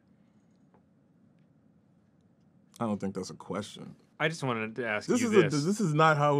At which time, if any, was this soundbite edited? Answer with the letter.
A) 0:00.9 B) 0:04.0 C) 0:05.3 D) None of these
B